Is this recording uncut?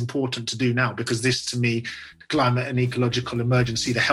yes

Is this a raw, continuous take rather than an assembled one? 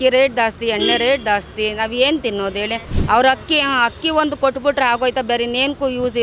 yes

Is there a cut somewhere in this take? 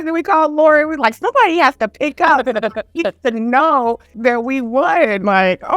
no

